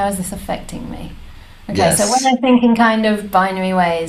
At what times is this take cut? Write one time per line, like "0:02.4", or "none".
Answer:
none